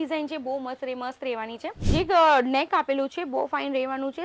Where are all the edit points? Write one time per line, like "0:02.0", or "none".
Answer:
0:01.7

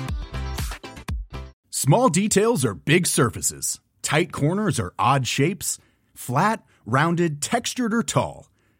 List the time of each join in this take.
0:01.6

